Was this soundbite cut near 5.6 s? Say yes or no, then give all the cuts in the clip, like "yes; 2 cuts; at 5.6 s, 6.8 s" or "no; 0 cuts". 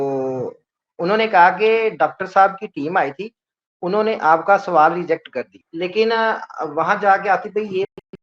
yes; 1 cut; at 5.6 s